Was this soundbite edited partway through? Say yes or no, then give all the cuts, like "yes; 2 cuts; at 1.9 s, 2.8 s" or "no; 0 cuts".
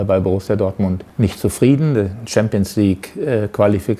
yes; 1 cut; at 1.0 s